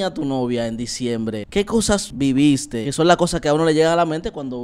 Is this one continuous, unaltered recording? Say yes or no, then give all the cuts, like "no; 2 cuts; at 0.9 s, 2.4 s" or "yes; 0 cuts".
no; 2 cuts; at 1.6 s, 2.9 s